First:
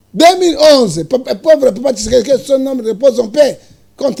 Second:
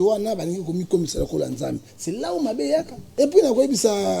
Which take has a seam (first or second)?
second